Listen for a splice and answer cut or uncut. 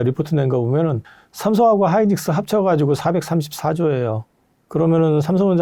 uncut